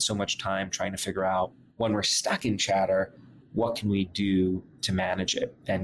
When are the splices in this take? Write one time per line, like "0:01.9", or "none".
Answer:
0:01.6
0:04.7